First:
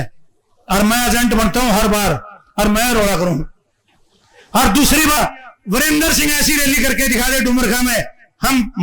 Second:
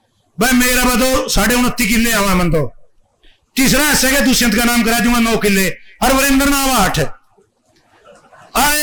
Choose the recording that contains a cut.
first; 1 cut; at 5.1 s

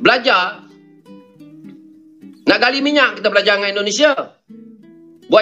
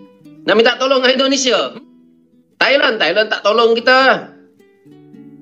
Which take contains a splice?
second; 1 cut; at 1.7 s

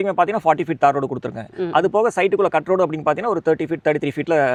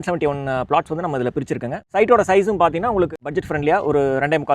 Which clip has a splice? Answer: second; 2 cuts; at 1.8 s, 3.1 s

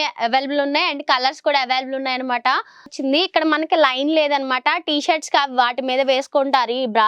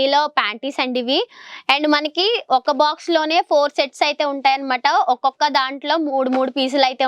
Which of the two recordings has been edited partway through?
first; 1 cut; at 2.9 s

